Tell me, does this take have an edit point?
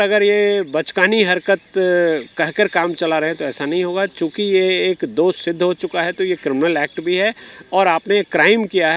no; 0 cuts

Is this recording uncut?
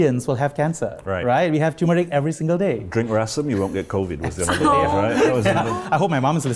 yes; 0 cuts

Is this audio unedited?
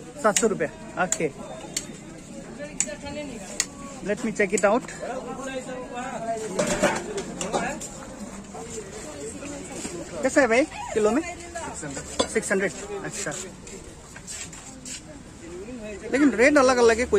no; 1 cut; at 8.6 s

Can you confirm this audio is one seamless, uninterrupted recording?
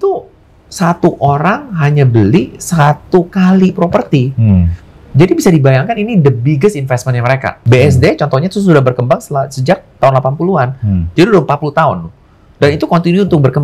no; 1 cut; at 7.6 s

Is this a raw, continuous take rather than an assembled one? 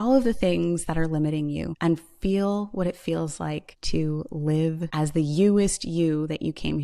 no; 3 cuts; at 1.7 s, 3.7 s, 4.9 s

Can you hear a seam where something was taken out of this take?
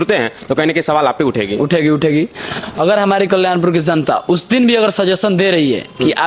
no; 0 cuts

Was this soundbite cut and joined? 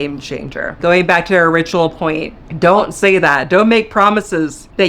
yes; 1 cut; at 2.5 s

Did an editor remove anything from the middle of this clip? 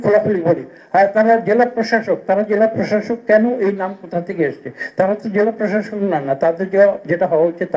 no; 0 cuts

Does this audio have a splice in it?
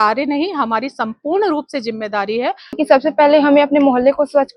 yes; 1 cut; at 2.8 s

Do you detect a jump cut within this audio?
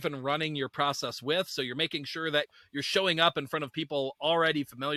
no; 0 cuts

